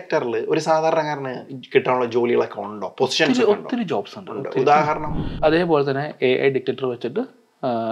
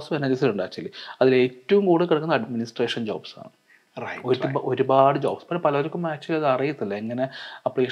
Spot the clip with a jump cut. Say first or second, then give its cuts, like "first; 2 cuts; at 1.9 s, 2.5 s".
first; 1 cut; at 5.3 s